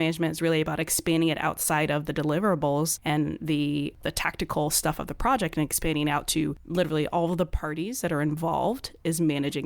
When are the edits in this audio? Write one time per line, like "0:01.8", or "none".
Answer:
0:03.0
0:04.0
0:06.6